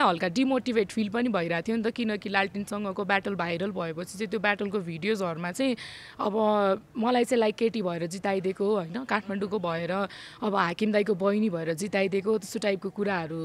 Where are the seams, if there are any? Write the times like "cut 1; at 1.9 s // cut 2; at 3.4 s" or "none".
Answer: none